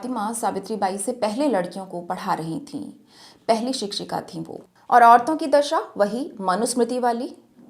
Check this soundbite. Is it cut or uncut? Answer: cut